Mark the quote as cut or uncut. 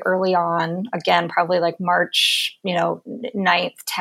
uncut